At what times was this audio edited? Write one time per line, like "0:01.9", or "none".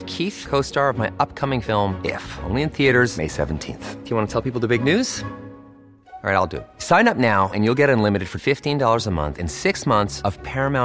none